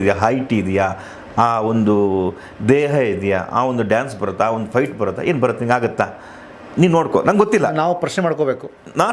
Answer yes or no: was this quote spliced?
no